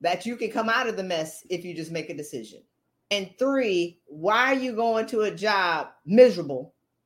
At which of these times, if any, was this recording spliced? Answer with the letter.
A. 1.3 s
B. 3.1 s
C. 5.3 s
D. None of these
B